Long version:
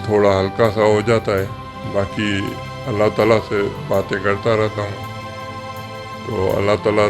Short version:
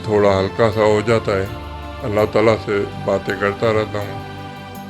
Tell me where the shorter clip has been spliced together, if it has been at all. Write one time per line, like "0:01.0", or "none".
0:01.7